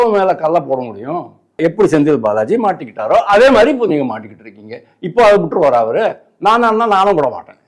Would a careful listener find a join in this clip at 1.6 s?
yes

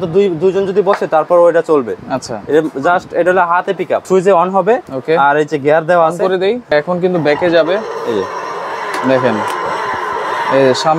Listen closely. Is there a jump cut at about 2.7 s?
no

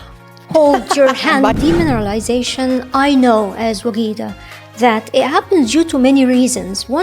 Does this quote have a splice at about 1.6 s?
yes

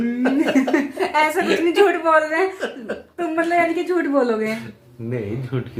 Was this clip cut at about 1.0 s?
no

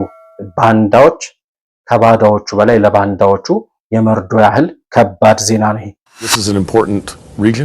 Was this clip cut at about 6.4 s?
yes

